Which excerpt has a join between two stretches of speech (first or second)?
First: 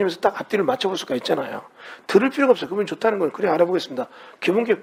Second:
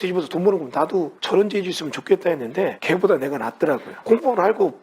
second